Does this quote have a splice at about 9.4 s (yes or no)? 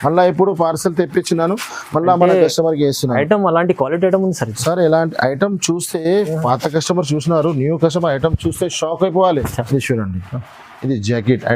yes